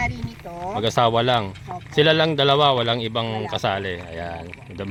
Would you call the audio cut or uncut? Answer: uncut